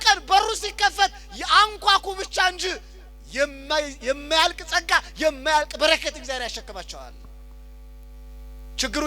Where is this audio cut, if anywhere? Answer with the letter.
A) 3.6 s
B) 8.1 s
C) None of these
C